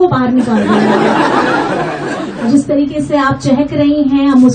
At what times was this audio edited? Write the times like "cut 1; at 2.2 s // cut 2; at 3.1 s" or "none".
cut 1; at 2.5 s

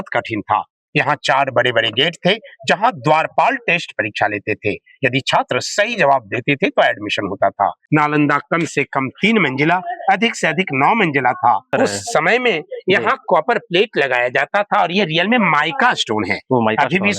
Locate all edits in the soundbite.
cut 1; at 7.8 s // cut 2; at 11.7 s

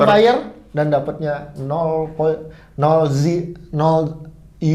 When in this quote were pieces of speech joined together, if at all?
none

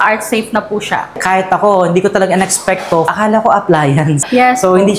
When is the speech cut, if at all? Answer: cut 1; at 1.2 s // cut 2; at 3.1 s // cut 3; at 4.2 s

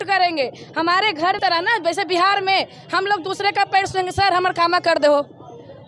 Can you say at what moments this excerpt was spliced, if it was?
cut 1; at 1.4 s

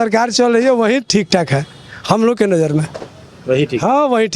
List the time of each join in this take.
none

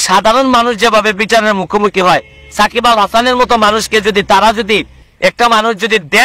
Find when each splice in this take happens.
cut 1; at 5.0 s

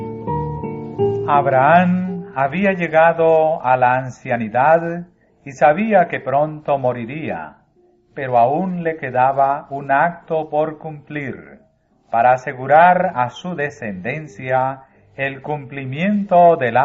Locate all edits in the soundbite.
none

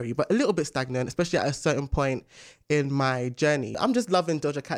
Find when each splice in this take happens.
cut 1; at 3.8 s

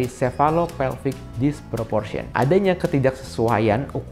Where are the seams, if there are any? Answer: cut 1; at 2.2 s

